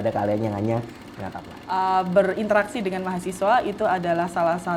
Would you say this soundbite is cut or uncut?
cut